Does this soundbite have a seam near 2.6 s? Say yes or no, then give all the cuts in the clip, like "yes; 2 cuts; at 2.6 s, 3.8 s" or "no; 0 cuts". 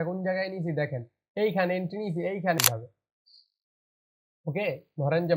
yes; 1 cut; at 2.6 s